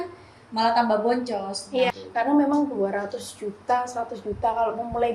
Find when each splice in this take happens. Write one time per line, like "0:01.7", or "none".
0:01.9